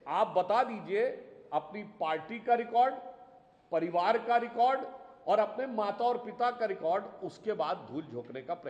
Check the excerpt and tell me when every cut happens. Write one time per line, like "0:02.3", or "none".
none